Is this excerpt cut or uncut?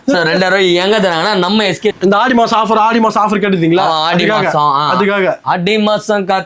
cut